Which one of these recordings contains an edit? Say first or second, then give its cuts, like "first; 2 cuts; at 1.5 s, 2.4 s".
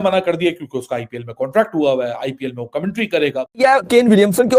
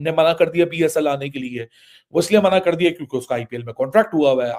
first; 1 cut; at 3.5 s